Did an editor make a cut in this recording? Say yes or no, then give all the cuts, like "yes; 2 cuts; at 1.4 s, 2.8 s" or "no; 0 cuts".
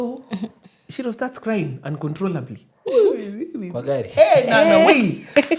no; 0 cuts